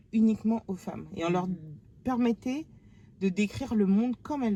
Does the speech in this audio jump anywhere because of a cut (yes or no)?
no